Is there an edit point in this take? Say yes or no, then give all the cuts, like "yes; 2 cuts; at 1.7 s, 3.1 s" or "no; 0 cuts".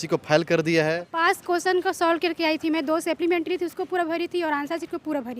yes; 1 cut; at 1.1 s